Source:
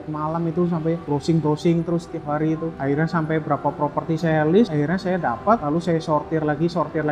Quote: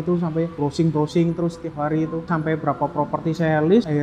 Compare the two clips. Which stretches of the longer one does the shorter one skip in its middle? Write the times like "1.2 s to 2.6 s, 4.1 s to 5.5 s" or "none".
2.8 s to 3.1 s

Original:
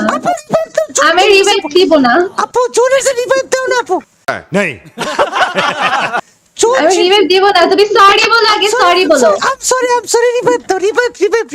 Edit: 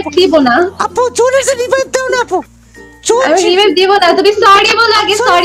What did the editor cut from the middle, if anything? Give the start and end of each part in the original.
4.3 s to 6.3 s

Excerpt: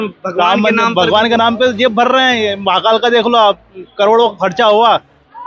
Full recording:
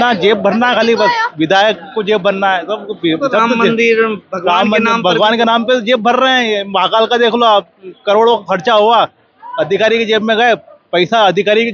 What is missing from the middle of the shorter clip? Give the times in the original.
none

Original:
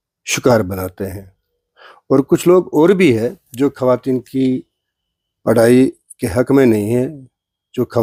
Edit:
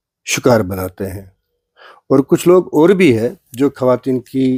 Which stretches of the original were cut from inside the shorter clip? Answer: none

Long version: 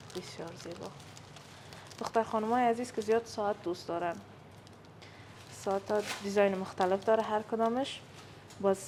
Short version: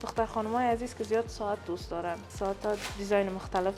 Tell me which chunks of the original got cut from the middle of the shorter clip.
4.2 s to 5.5 s

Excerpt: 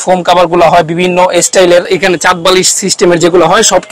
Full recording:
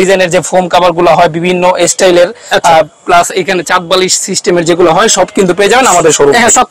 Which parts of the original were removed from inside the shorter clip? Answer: 2.3 s to 3.3 s

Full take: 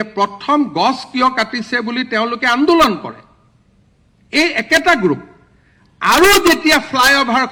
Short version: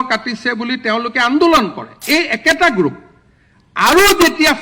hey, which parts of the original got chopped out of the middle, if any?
3.2 s to 4.1 s

